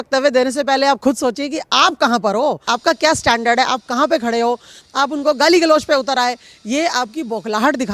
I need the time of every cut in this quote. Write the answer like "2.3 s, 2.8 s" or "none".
none